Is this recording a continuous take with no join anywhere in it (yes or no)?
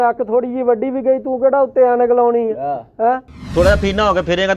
yes